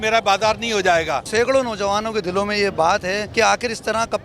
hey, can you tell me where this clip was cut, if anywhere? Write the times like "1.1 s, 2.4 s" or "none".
1.2 s, 3.3 s